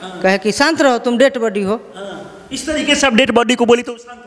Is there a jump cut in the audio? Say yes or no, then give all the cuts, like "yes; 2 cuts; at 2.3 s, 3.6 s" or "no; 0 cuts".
no; 0 cuts